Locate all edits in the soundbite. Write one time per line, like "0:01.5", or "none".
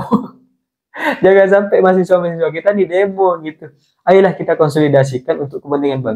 none